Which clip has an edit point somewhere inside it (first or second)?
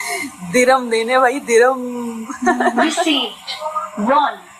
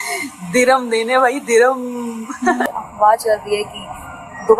second